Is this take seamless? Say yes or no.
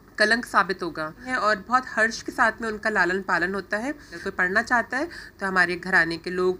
no